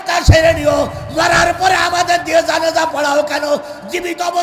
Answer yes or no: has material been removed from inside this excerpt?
no